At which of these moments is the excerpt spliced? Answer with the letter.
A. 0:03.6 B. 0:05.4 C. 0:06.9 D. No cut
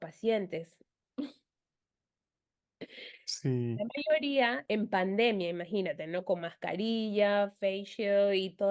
D